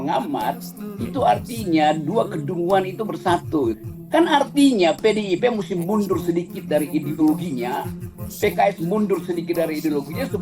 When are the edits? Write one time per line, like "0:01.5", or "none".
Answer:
0:03.8